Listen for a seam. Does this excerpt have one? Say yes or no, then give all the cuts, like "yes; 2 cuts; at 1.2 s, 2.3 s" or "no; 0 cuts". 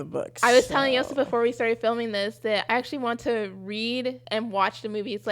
yes; 2 cuts; at 2.6 s, 4.2 s